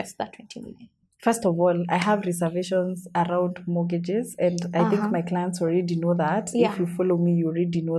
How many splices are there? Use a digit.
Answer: 0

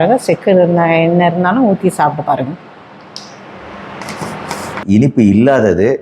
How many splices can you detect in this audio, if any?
1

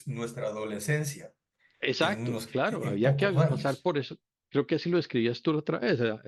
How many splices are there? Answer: 0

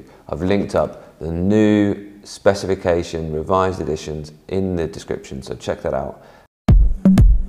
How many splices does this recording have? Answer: 1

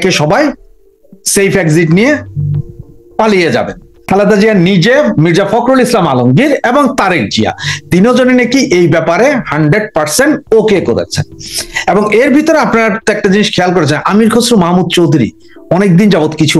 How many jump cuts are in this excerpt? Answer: 1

